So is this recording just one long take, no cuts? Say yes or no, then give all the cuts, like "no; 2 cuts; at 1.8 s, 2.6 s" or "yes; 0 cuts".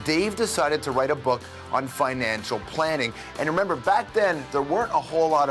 yes; 0 cuts